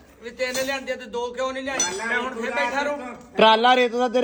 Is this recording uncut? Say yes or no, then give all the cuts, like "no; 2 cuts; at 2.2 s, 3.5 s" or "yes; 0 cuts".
yes; 0 cuts